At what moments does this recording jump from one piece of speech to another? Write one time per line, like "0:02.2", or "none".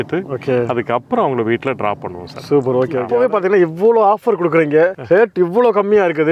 0:03.0